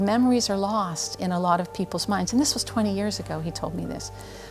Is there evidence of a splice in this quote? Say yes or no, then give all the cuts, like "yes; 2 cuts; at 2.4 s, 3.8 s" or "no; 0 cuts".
no; 0 cuts